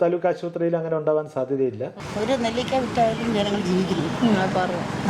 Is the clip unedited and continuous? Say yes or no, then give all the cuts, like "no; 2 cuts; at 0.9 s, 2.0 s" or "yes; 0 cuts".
no; 1 cut; at 2.0 s